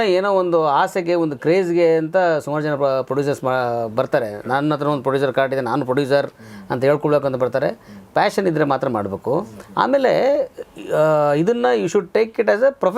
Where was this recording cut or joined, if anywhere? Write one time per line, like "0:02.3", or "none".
none